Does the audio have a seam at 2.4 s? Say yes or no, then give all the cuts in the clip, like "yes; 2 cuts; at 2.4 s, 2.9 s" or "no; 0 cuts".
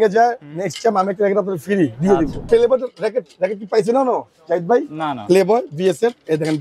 yes; 1 cut; at 2.4 s